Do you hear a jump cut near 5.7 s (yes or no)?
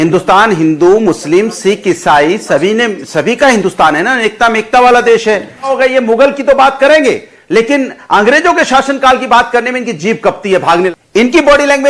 yes